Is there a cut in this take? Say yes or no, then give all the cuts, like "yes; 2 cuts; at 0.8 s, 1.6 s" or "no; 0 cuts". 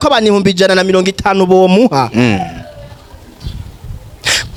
no; 0 cuts